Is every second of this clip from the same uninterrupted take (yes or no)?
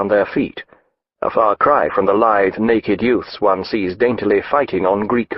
yes